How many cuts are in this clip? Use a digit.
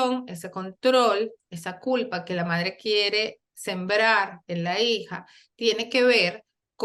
0